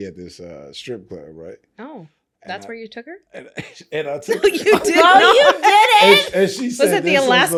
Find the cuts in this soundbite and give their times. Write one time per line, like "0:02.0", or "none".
none